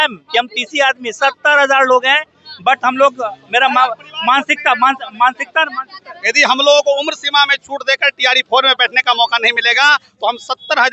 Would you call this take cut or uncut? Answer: uncut